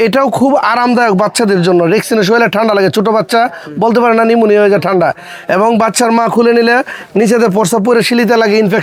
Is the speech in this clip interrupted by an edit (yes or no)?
no